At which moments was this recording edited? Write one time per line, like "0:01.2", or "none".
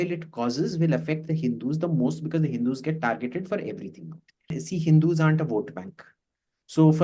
0:04.6